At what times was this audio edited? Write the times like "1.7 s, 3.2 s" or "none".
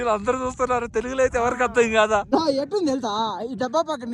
2.3 s